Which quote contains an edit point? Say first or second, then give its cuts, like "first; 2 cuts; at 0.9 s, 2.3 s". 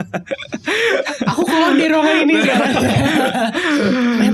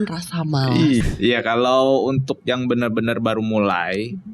second; 1 cut; at 1.0 s